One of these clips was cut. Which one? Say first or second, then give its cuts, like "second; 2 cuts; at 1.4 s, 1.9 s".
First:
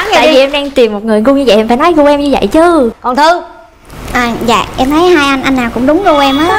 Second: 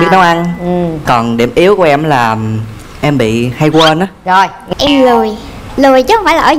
second; 1 cut; at 4.6 s